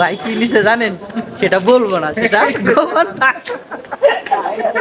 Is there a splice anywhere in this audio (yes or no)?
no